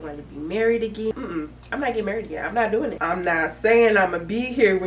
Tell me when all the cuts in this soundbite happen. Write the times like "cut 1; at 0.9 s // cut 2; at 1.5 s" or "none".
cut 1; at 1.1 s // cut 2; at 3.0 s